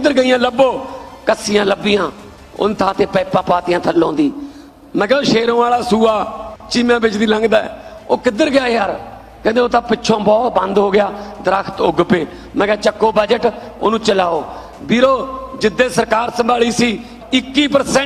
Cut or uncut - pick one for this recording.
cut